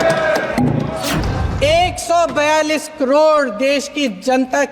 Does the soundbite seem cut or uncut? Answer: cut